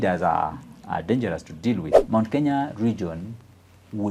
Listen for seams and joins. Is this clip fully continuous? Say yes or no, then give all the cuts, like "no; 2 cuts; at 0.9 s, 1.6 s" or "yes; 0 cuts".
no; 1 cut; at 2.0 s